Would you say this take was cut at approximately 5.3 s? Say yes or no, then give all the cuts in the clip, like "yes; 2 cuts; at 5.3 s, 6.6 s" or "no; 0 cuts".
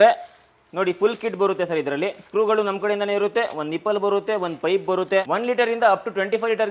yes; 1 cut; at 5.3 s